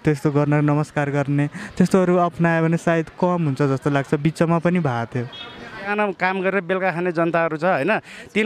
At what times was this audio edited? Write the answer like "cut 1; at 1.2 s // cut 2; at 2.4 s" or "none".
cut 1; at 5.9 s